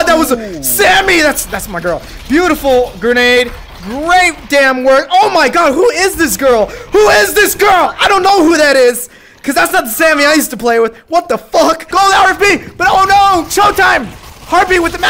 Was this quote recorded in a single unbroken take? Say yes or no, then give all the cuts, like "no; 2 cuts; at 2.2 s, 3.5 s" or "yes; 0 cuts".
no; 1 cut; at 11.9 s